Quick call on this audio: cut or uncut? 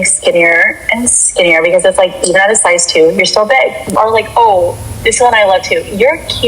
cut